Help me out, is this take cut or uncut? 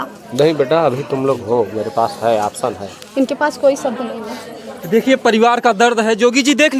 uncut